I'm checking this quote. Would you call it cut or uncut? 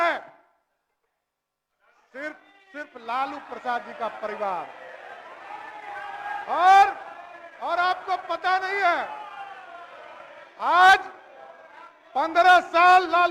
uncut